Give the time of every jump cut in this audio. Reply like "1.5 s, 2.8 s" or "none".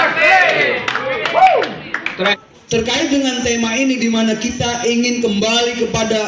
2.3 s

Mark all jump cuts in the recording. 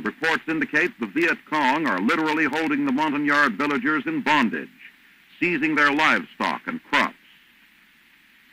none

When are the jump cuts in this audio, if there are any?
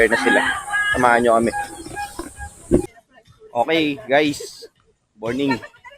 2.9 s

